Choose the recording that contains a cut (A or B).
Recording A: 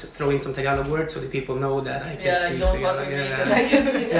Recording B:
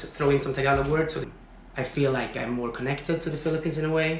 B